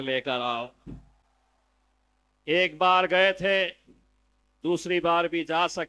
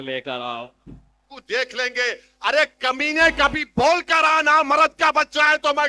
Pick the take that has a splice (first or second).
second